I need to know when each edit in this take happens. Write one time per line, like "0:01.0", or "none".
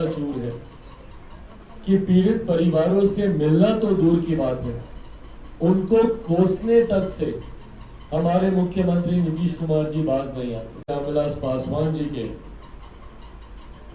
0:10.9